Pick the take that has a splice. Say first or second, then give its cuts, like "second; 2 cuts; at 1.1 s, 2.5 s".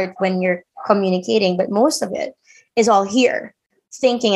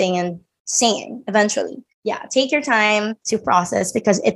second; 2 cuts; at 1.9 s, 3.2 s